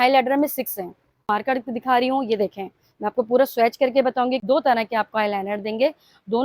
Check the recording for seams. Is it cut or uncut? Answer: cut